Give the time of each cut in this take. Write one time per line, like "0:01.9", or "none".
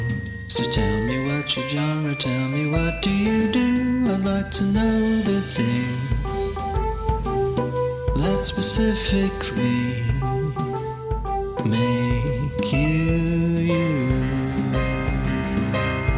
none